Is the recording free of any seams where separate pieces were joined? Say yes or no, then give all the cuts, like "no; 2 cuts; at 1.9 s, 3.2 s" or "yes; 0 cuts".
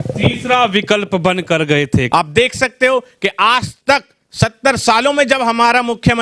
no; 1 cut; at 2.1 s